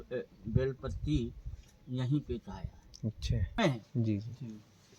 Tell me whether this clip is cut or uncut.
cut